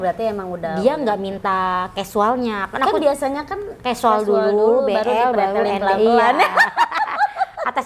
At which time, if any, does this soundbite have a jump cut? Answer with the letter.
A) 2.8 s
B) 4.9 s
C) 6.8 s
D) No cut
D